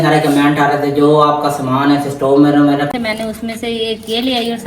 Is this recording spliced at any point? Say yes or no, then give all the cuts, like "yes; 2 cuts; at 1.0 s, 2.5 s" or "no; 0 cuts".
yes; 1 cut; at 2.9 s